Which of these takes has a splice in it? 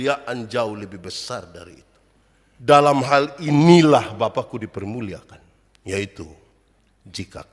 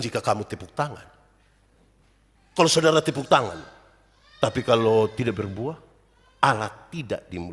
first; 1 cut; at 2.7 s

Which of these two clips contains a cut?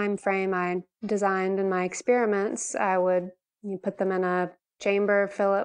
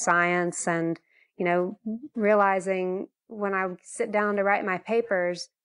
first; 2 cuts; at 0.9 s, 4.6 s

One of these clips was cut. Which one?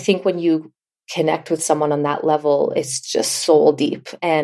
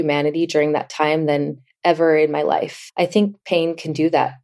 second; 1 cut; at 2.8 s

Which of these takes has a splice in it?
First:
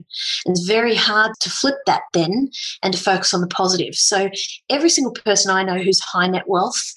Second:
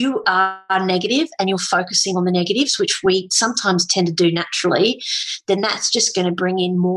first; 1 cut; at 1.4 s

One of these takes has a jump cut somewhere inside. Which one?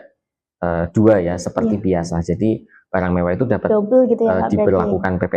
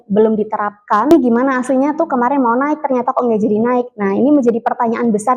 second; 1 cut; at 1.1 s

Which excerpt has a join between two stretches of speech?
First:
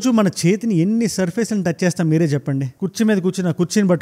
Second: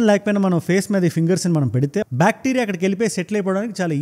second; 1 cut; at 2.0 s

